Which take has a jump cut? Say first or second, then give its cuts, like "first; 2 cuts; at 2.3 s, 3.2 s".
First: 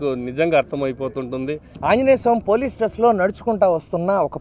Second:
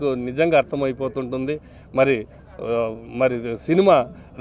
first; 1 cut; at 1.7 s